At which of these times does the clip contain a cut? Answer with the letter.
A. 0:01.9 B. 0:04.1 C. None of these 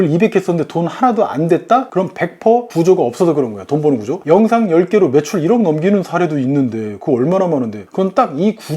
A